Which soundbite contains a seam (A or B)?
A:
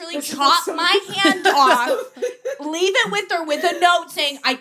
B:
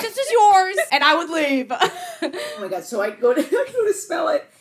B